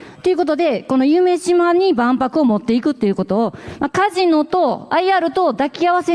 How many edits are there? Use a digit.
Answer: 0